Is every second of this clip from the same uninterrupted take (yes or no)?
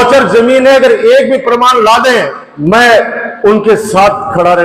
no